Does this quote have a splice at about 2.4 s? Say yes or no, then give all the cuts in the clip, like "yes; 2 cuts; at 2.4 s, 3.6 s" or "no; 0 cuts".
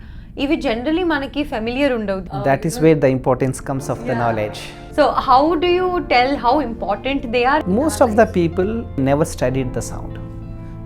yes; 3 cuts; at 2.4 s, 7.6 s, 9.0 s